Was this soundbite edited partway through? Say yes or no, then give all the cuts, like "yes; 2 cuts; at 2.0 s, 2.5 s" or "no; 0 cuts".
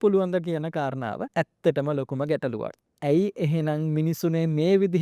yes; 2 cuts; at 1.2 s, 2.8 s